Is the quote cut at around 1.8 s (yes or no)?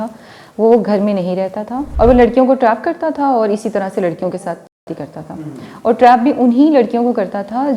yes